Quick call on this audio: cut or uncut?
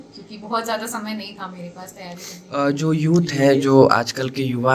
cut